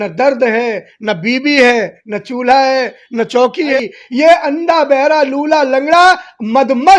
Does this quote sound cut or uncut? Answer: cut